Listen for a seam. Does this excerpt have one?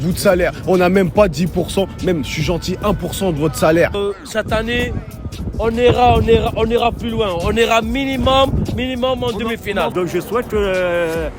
yes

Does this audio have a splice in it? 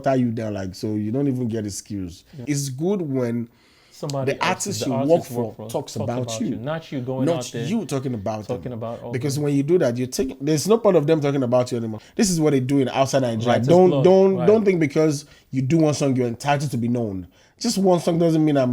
yes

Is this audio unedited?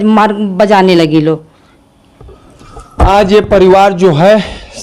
yes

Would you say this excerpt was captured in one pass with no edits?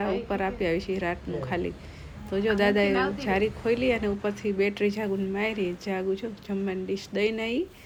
yes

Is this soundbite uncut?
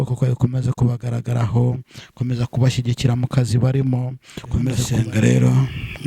no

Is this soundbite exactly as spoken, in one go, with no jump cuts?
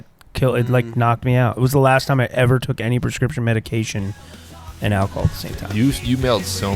yes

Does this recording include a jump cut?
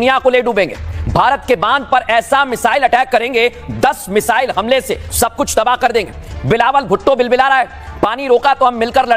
no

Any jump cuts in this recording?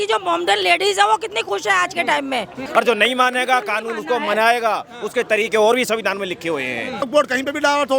yes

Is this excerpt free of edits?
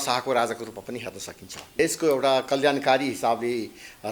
no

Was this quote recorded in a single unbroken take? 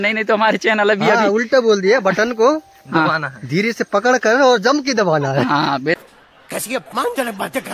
yes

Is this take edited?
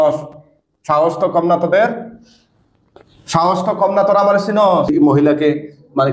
yes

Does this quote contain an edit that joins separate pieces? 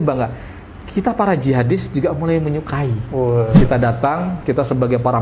yes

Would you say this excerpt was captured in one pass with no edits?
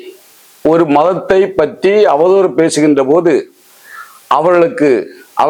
yes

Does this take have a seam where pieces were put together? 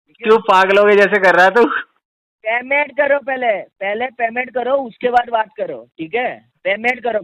no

